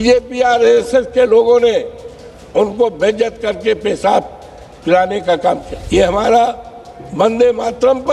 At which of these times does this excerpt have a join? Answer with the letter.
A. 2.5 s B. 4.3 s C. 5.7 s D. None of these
C